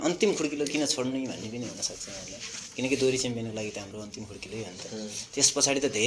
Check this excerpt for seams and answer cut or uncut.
uncut